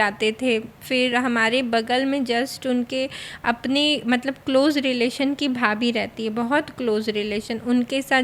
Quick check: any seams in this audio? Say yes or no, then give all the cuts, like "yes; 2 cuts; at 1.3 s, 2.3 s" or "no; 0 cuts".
no; 0 cuts